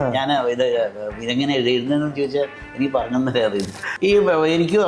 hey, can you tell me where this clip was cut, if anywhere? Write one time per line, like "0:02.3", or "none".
0:03.8

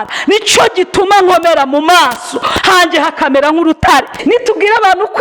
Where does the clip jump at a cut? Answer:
0:04.1

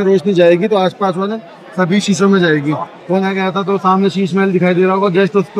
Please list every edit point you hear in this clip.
0:03.2

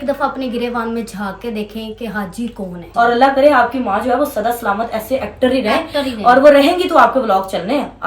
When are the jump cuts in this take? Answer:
0:02.9

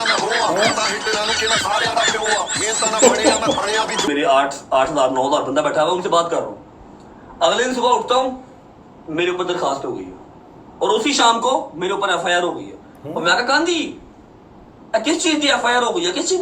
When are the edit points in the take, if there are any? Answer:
0:04.1

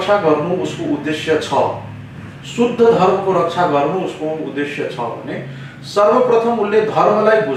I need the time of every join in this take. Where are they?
none

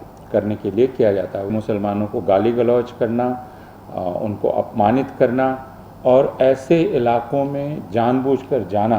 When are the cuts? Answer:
0:01.5

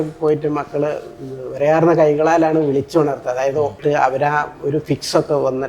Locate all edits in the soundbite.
0:03.8

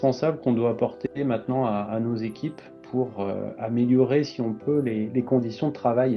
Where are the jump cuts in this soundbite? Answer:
none

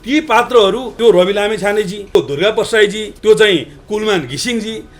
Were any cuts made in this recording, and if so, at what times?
0:00.9
0:02.1
0:03.1

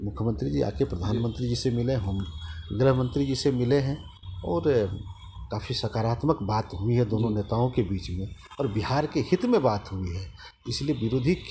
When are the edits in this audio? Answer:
none

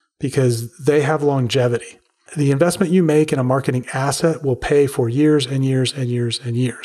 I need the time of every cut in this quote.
0:02.2

